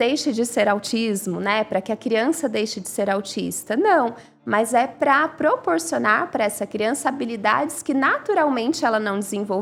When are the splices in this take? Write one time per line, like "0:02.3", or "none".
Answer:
none

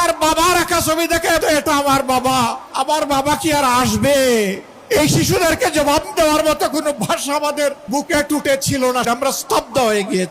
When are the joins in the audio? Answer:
0:01.4
0:02.6
0:04.7
0:07.8
0:09.1

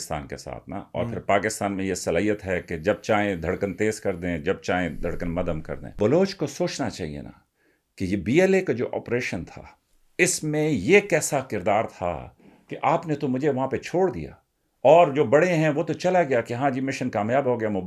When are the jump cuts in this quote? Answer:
0:05.9

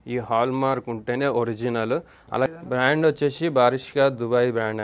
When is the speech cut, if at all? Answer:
0:02.5

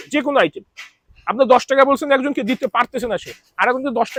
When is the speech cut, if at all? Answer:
none

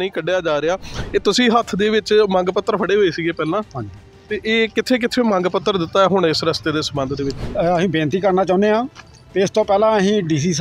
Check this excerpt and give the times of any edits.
0:00.9

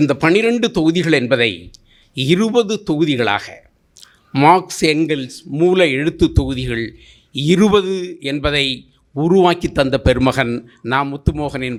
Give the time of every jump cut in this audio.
none

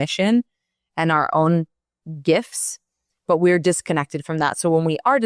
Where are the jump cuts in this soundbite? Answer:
none

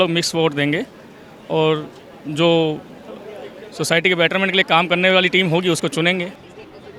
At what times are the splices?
none

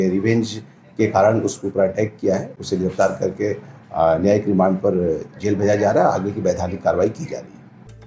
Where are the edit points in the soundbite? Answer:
none

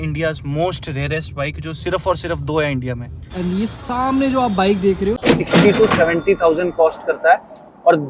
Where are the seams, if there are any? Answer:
0:03.2
0:05.3

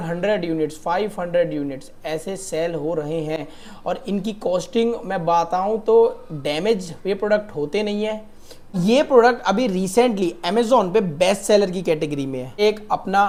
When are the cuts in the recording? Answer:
none

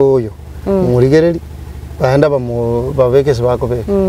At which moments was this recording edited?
none

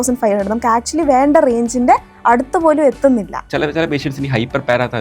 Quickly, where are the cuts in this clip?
0:03.4

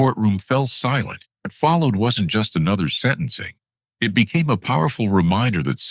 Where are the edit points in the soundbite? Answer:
0:01.5

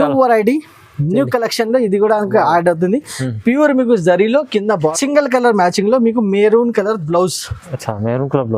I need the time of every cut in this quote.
0:04.9

